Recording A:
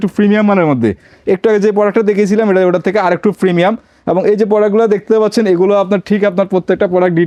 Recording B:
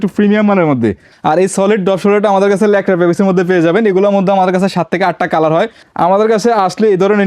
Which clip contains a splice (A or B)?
B